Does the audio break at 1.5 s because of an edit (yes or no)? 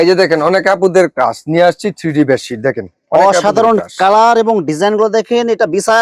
no